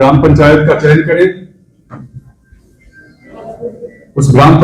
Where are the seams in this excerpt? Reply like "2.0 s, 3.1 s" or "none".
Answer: none